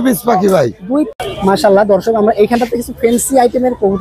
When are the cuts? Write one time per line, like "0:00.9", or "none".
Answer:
0:01.2